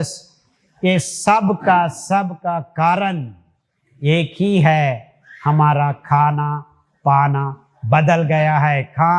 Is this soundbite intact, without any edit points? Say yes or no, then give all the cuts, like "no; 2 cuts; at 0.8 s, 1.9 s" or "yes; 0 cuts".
yes; 0 cuts